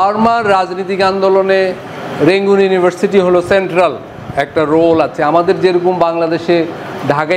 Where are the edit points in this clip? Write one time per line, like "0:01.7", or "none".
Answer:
none